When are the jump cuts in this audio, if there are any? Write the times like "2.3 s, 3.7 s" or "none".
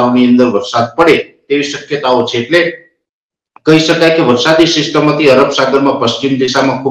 none